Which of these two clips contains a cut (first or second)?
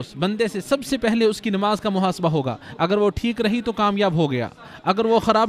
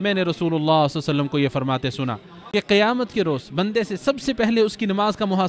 second